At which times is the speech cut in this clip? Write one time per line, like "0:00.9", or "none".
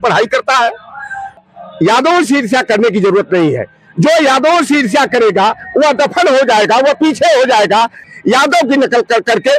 0:01.4
0:08.1

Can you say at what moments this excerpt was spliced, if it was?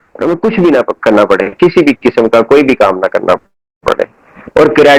none

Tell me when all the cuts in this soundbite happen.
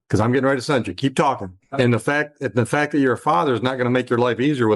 0:01.6

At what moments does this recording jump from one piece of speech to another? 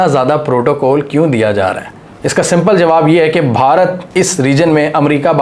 none

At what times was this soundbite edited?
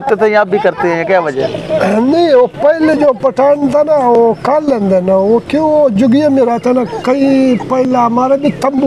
none

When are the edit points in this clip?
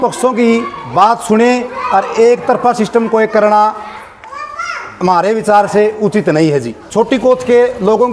0:06.8

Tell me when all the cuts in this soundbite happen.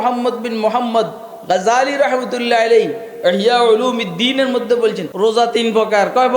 0:05.1

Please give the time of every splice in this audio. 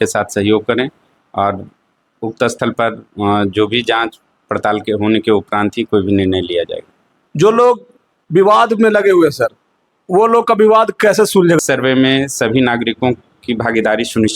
none

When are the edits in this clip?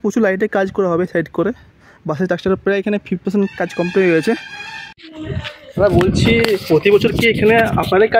0:04.9

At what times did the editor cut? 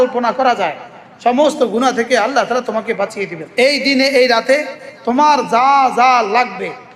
0:03.4

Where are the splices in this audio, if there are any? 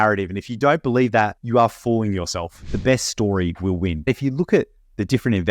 0:01.4
0:02.6
0:04.1

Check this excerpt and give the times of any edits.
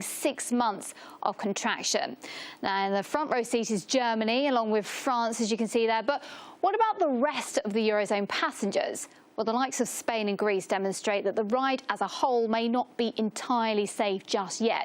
0:03.8

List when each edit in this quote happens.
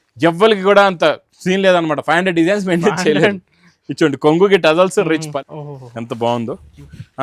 0:05.3

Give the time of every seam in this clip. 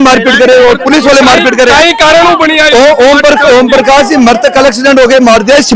none

